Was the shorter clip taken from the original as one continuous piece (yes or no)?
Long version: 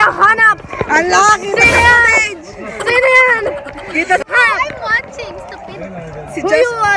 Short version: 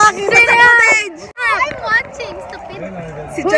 no